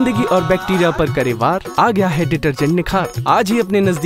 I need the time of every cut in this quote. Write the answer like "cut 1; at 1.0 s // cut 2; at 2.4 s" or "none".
none